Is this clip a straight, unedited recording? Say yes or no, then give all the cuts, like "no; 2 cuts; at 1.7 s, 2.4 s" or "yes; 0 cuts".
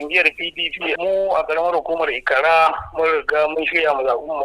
no; 1 cut; at 0.9 s